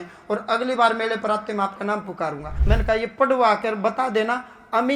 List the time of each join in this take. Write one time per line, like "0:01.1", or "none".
0:02.5